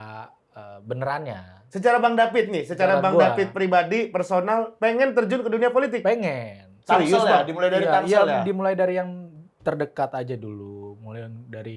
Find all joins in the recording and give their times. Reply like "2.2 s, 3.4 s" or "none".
none